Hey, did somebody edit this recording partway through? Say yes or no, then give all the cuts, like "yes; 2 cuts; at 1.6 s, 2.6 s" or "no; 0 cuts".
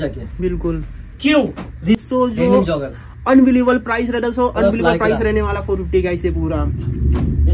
yes; 1 cut; at 1.9 s